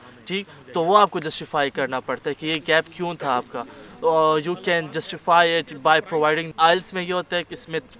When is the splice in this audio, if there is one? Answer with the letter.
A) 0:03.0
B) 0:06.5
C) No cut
B